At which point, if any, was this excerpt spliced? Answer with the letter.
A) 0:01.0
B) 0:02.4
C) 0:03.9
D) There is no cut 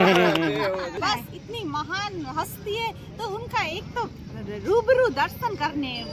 A